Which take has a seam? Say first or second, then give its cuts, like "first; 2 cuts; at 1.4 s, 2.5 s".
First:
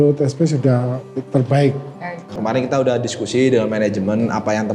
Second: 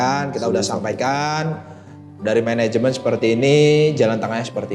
first; 1 cut; at 2.3 s